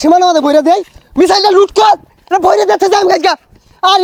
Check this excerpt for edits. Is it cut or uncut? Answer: uncut